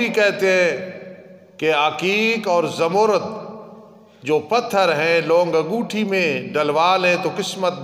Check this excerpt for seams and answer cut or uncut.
uncut